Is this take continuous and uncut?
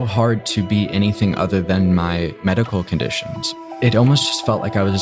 no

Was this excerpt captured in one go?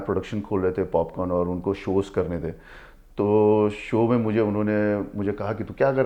yes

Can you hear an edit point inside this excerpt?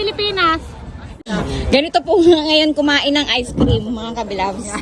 yes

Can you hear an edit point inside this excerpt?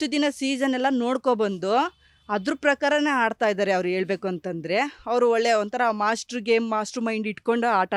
no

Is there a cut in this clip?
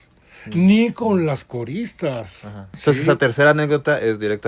yes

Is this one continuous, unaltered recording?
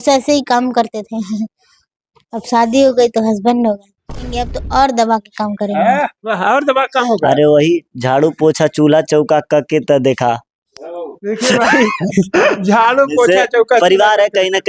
no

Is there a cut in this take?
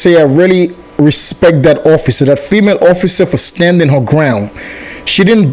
no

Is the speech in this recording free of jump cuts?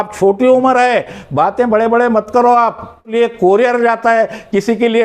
no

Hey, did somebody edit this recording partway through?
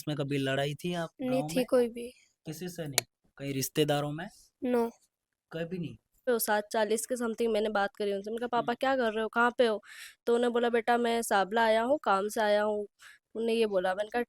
yes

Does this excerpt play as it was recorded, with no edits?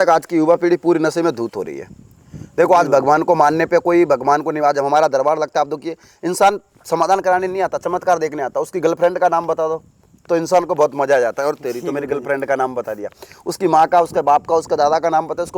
yes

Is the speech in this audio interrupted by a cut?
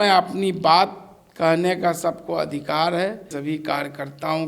yes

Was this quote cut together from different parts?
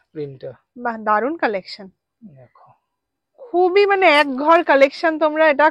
no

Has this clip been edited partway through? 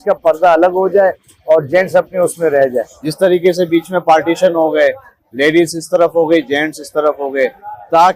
no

